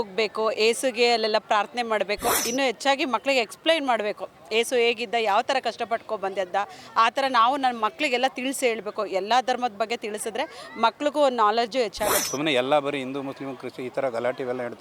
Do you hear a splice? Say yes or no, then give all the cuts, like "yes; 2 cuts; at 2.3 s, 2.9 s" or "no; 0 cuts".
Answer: yes; 2 cuts; at 2.4 s, 12.2 s